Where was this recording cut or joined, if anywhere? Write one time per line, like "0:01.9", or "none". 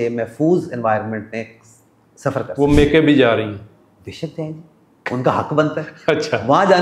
none